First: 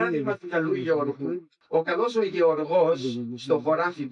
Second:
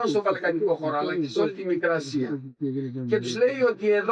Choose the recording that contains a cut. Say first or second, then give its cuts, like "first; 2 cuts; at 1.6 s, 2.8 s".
first; 1 cut; at 1.5 s